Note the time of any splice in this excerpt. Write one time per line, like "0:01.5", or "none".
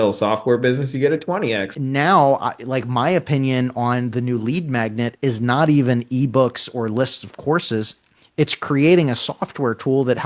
0:01.7